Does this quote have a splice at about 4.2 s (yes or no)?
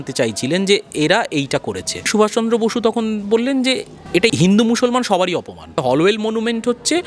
yes